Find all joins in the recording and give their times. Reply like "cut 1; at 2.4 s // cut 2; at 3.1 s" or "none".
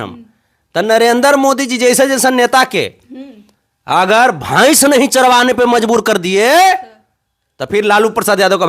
none